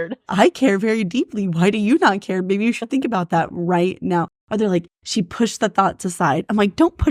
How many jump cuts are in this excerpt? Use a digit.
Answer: 0